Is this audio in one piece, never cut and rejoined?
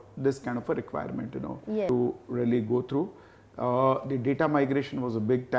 no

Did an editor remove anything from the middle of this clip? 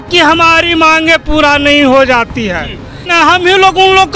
yes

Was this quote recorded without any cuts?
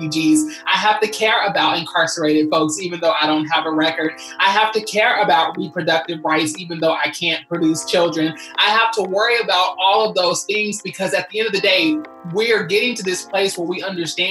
yes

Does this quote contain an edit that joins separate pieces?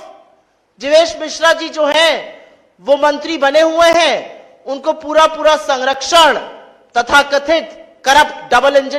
no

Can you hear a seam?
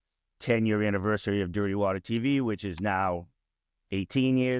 no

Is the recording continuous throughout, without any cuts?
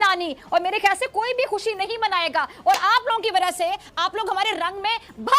yes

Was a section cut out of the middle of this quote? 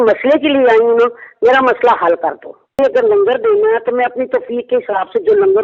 yes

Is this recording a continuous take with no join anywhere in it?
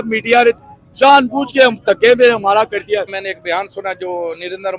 no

